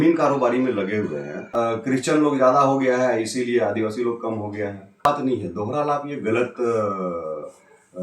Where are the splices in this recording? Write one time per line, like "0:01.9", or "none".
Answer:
0:01.4
0:05.1